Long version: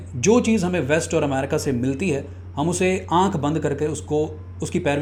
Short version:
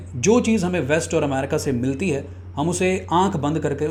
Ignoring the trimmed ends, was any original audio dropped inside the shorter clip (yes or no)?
no